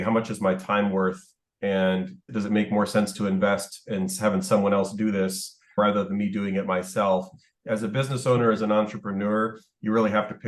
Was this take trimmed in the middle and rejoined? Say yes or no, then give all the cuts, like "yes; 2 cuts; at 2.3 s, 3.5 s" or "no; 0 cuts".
yes; 1 cut; at 7.6 s